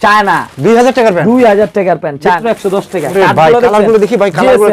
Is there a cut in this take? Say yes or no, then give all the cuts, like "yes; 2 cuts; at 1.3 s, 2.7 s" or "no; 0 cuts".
yes; 1 cut; at 2.4 s